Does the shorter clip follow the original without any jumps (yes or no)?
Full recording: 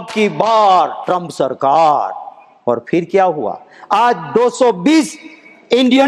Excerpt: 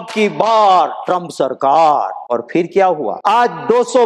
no